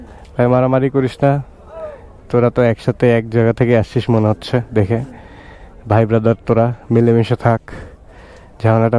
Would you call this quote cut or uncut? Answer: uncut